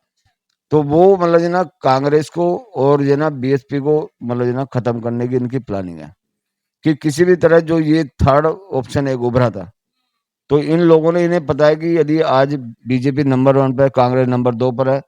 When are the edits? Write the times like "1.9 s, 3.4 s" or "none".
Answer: none